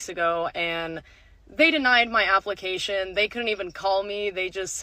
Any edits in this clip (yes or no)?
yes